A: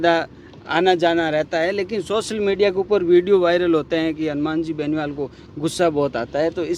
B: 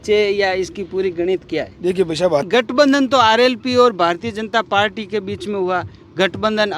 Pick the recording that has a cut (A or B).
B